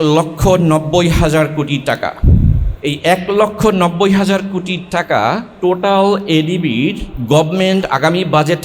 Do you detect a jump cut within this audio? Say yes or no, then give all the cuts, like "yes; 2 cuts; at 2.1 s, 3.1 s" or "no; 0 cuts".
yes; 3 cuts; at 2.7 s, 5.5 s, 7.1 s